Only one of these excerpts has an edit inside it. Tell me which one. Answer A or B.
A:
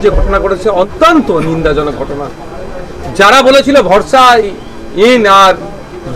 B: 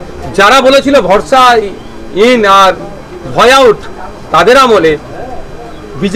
A